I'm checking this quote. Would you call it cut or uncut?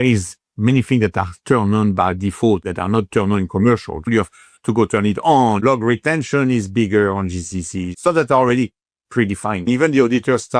cut